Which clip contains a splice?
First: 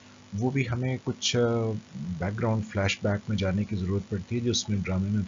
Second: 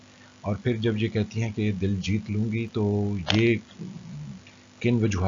second; 1 cut; at 1.9 s

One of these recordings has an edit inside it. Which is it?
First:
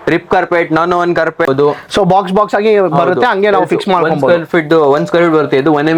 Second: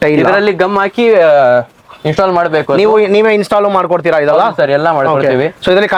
first; 1 cut; at 1.5 s

